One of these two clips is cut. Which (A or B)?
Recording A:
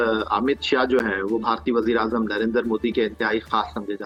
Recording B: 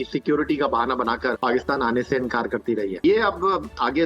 B